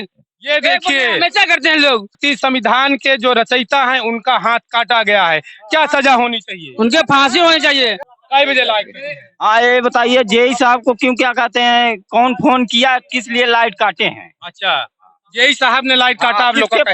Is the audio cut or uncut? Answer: cut